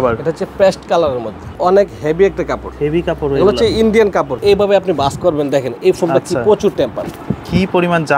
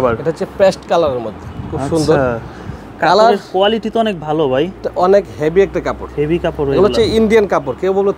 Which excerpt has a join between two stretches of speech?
first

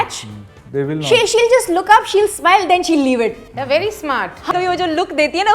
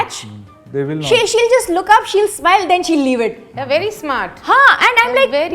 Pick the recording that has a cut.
first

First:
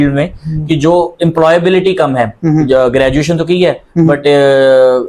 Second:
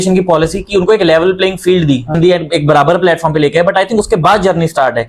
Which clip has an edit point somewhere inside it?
second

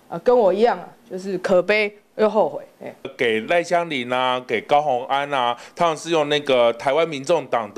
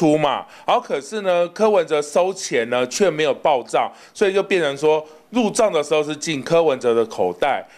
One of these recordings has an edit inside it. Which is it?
first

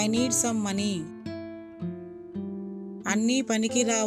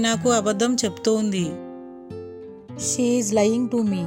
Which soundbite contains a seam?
first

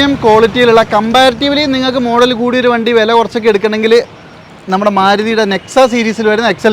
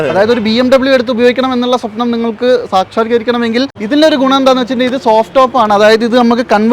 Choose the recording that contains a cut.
second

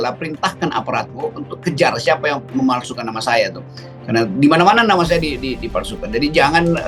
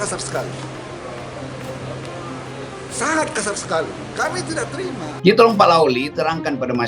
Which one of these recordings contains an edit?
second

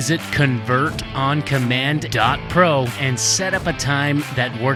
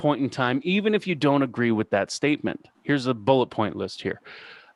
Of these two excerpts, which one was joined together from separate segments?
second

